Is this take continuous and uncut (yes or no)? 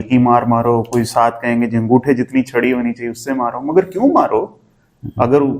yes